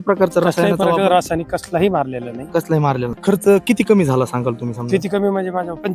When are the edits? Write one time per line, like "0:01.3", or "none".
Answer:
0:03.2